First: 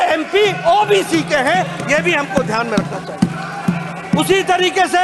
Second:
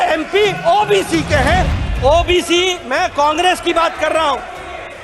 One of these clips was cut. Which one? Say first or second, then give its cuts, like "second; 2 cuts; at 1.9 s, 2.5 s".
second; 1 cut; at 1.8 s